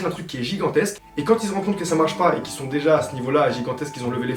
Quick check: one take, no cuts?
yes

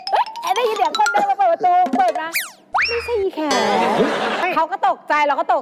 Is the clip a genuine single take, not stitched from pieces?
no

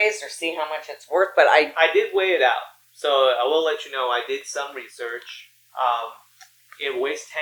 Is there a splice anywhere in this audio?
no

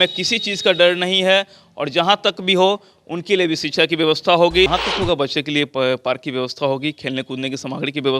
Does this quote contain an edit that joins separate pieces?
yes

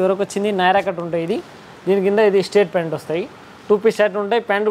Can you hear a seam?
no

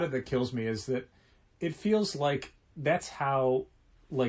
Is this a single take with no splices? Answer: yes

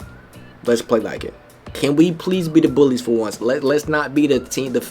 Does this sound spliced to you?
yes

